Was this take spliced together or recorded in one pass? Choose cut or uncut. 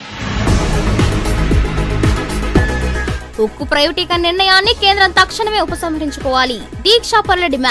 uncut